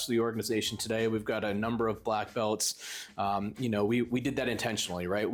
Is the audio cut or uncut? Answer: uncut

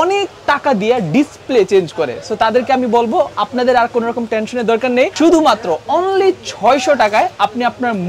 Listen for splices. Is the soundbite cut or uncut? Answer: uncut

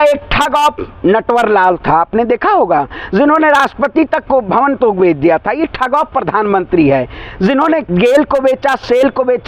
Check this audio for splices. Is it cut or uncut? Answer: uncut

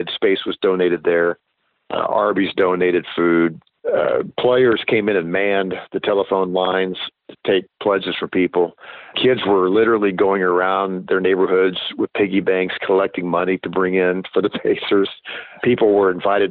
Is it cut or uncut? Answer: cut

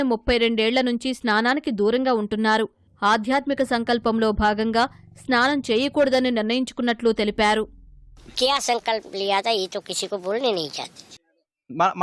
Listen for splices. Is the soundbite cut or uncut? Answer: uncut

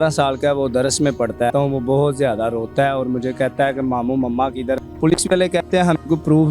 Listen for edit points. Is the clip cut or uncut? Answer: cut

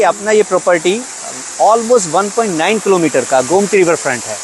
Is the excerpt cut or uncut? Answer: uncut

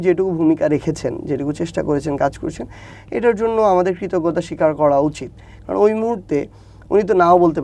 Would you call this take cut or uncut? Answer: uncut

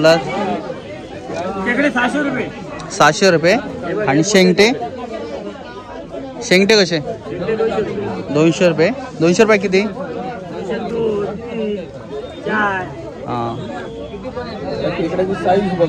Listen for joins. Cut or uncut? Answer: uncut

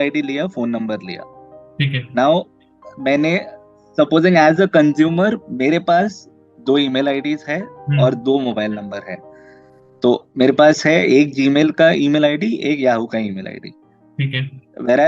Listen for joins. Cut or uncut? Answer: uncut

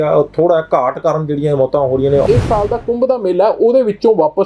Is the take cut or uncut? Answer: cut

